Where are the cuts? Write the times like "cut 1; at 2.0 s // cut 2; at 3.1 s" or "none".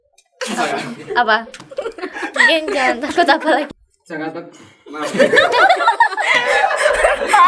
cut 1; at 3.7 s